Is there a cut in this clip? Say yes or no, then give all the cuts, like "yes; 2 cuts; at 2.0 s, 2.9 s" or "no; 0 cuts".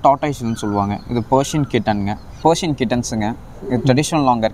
yes; 1 cut; at 2.3 s